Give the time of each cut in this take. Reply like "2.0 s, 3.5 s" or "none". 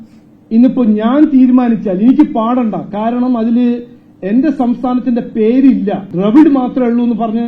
6.1 s